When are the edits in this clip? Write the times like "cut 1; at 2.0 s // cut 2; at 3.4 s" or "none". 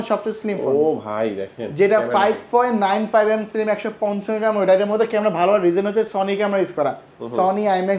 none